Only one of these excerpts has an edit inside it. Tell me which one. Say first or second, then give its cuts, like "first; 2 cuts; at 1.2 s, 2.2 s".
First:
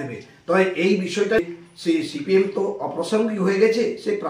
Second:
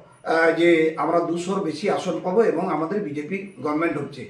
first; 1 cut; at 1.4 s